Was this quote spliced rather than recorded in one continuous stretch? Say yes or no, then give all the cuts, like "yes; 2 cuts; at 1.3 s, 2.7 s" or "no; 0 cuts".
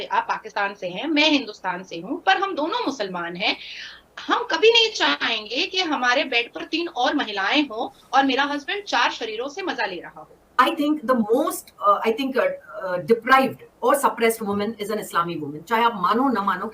yes; 1 cut; at 10.4 s